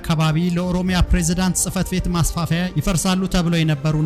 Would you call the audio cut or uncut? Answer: uncut